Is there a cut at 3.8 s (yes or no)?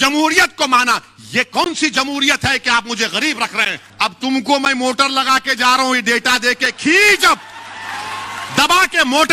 yes